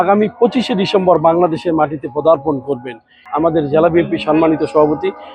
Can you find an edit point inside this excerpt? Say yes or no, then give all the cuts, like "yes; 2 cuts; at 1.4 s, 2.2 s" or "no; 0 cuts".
yes; 1 cut; at 3.2 s